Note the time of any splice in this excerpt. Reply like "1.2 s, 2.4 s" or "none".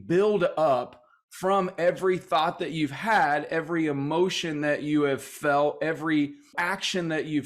6.6 s